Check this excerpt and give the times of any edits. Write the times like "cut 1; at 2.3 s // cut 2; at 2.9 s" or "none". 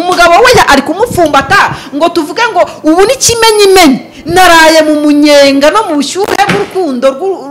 none